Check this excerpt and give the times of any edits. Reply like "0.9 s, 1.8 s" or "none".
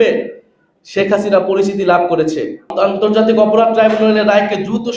2.7 s